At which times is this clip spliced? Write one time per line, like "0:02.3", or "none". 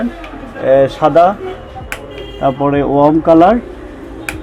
none